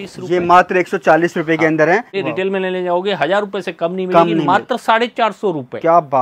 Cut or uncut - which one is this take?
cut